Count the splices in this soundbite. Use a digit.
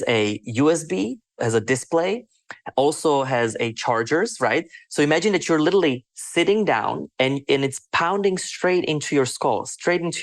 1